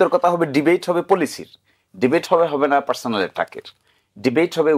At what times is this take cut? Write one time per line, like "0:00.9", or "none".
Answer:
none